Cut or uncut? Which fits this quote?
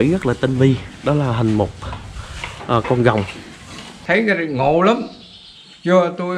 cut